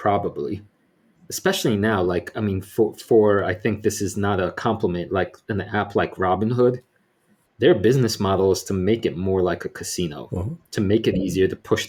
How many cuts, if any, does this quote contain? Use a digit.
0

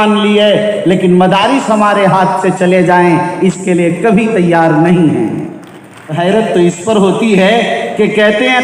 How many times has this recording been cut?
1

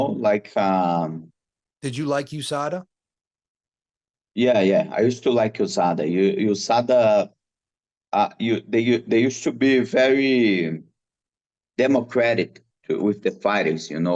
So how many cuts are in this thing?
0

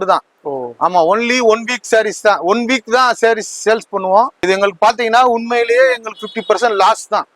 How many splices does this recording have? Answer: 1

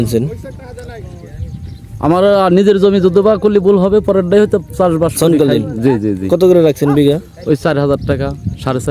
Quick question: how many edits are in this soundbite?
0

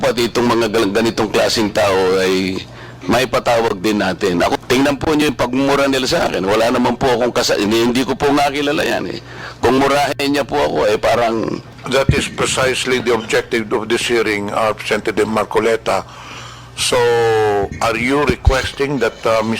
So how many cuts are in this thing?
2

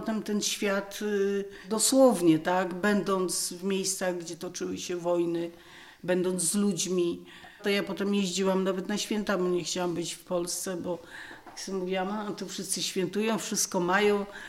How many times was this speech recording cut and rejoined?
2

